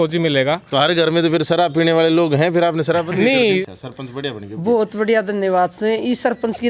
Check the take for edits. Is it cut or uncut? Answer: cut